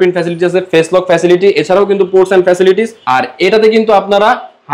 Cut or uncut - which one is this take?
uncut